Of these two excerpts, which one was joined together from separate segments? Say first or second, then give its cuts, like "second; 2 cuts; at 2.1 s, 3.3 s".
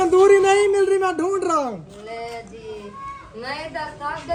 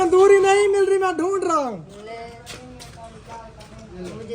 second; 1 cut; at 2.3 s